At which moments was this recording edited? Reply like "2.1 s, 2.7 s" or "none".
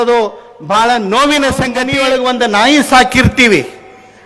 1.9 s